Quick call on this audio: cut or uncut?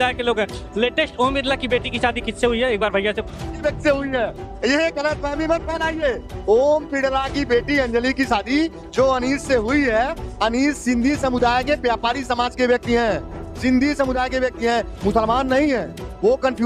uncut